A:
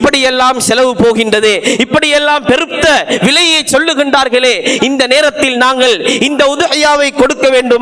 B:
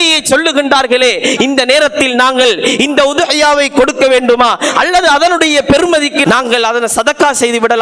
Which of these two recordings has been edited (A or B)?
B